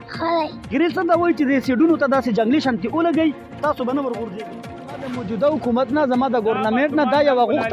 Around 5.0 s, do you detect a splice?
yes; 1 cut; at 5.0 s

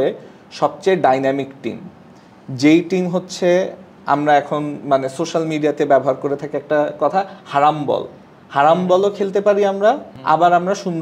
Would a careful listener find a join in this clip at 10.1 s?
yes; 1 cut; at 10.1 s

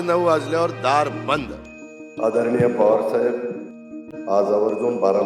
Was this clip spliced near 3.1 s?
no; 1 cut; at 1.6 s

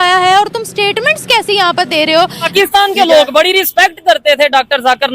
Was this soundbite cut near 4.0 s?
no; 1 cut; at 2.4 s

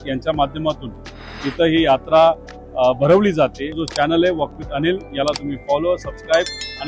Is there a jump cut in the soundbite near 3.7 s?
yes; 1 cut; at 3.7 s

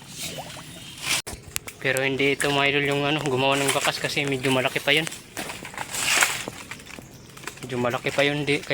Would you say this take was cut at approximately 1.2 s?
yes; 1 cut; at 1.2 s

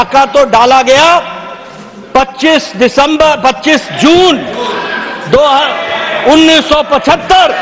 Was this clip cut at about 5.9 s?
no; 0 cuts

